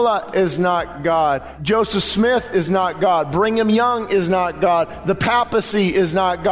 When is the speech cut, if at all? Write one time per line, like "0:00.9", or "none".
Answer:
0:01.5